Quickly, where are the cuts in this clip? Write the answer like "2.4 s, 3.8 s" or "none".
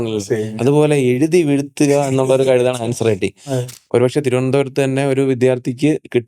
3.6 s